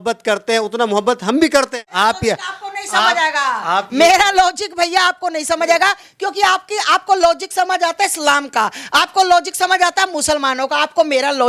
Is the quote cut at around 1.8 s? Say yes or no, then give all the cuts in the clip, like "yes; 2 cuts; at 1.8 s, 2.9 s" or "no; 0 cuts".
yes; 1 cut; at 1.8 s